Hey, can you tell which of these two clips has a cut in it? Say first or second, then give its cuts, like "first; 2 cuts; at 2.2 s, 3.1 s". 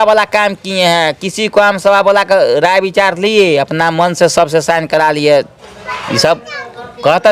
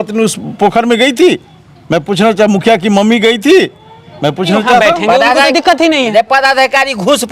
second; 1 cut; at 4.9 s